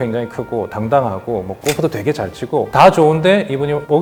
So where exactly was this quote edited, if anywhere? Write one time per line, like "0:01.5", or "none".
none